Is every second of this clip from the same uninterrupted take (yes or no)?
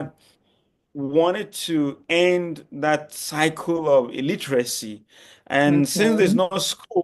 yes